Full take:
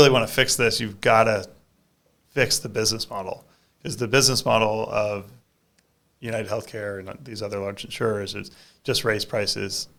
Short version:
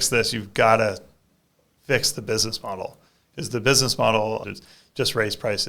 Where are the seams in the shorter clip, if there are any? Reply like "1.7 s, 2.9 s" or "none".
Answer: 4.4 s